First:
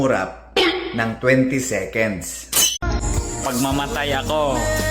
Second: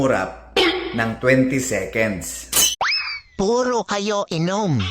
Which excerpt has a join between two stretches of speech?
second; 1 cut; at 2.7 s

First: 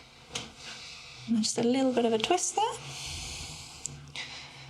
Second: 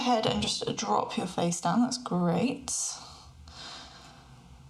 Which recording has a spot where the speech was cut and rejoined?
first; 1 cut; at 1.3 s

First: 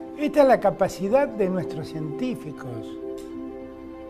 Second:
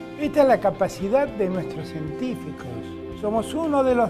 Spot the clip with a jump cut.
second; 1 cut; at 3.1 s

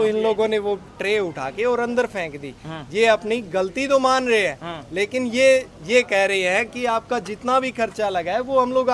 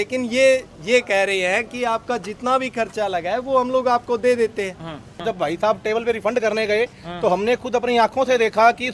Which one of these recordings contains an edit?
second; 1 cut; at 5.2 s

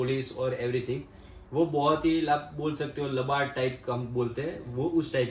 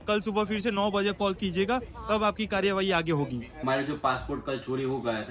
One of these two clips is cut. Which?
second; 1 cut; at 3.5 s

